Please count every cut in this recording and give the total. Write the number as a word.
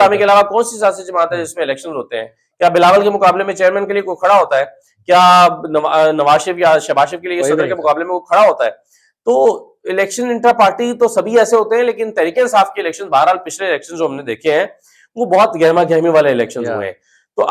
zero